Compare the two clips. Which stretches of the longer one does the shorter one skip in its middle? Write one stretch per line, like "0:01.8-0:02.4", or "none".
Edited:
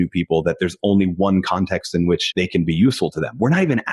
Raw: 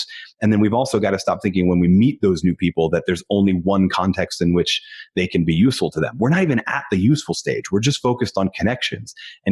0:04.7-0:05.1